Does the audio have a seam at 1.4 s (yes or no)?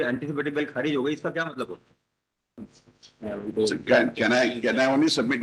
no